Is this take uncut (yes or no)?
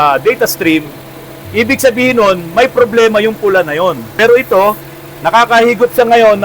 no